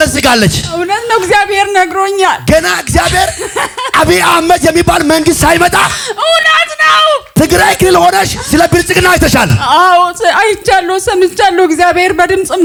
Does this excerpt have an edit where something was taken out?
no; 0 cuts

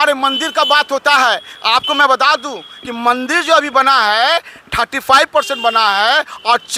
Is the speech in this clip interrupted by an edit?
no; 0 cuts

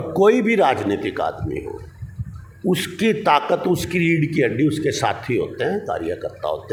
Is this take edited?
no; 0 cuts

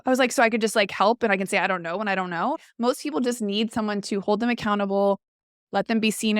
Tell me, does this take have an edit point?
yes; 1 cut; at 2.6 s

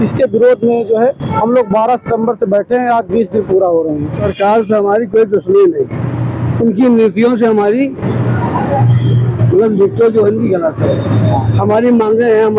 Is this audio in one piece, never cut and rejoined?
no; 1 cut; at 4.2 s

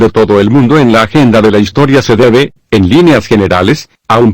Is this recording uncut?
no; 1 cut; at 1.8 s

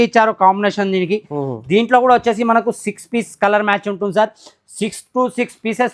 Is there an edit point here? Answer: no; 0 cuts

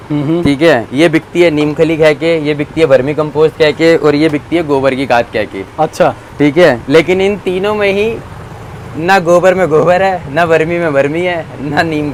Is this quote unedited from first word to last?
yes; 0 cuts

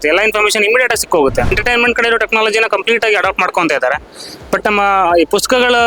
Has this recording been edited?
yes; 1 cut; at 1.6 s

